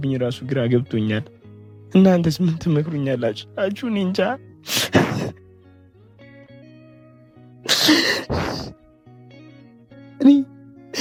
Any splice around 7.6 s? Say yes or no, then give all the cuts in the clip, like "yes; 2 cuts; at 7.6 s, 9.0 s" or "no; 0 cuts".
no; 0 cuts